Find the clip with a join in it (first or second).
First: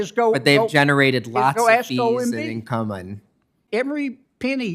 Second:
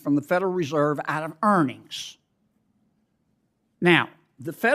first